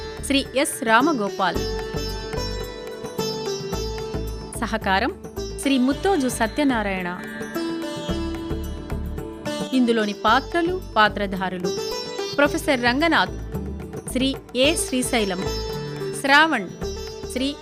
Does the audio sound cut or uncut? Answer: uncut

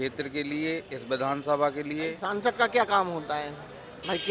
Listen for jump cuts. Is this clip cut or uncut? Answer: cut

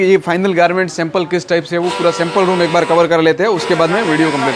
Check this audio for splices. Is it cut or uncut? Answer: uncut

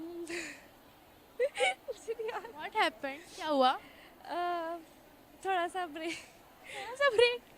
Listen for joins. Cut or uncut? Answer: uncut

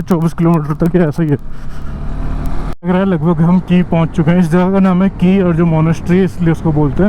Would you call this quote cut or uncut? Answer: cut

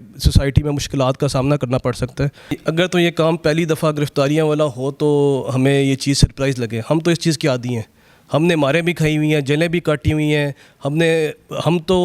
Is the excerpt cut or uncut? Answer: cut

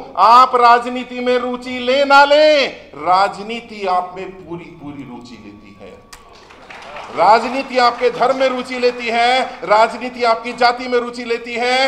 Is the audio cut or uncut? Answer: uncut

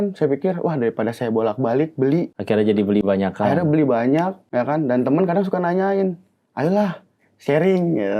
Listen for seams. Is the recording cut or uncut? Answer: cut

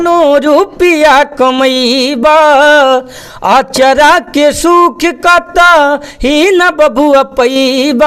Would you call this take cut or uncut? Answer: uncut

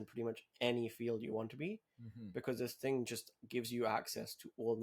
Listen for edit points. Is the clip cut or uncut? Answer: uncut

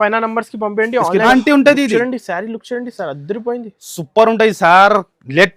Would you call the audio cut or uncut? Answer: cut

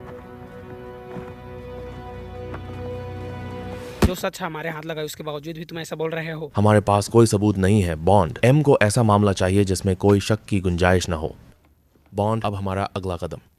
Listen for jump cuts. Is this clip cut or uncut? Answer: cut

